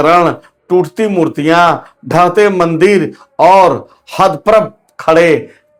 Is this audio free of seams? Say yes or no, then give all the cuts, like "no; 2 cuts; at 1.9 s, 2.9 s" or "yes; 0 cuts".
yes; 0 cuts